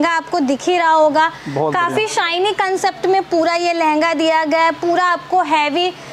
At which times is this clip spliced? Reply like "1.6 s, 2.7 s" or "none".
none

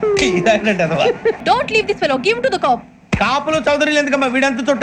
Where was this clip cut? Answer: 1.4 s

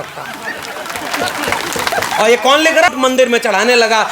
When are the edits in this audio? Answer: 2.9 s

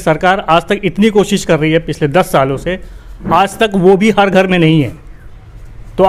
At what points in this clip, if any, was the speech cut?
none

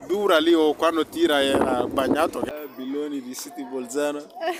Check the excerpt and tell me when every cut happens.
2.5 s

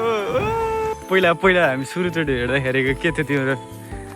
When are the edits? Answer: 0.9 s

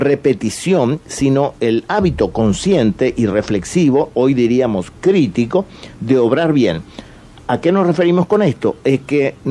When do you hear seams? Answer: 3.2 s

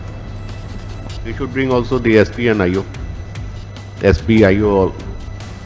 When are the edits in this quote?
1.0 s

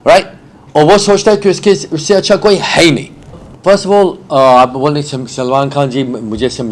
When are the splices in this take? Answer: 3.5 s

